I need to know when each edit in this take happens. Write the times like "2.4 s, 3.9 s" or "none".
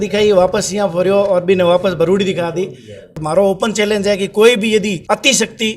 3.2 s, 5.0 s